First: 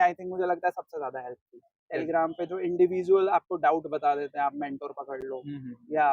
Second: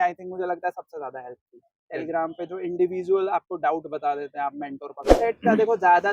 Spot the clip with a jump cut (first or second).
second